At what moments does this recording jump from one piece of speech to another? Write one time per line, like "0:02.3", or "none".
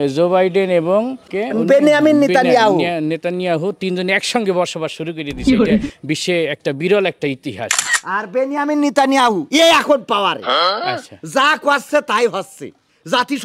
0:01.2
0:05.2
0:06.2
0:08.0